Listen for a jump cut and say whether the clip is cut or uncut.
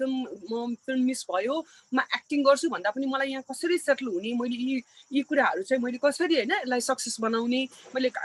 uncut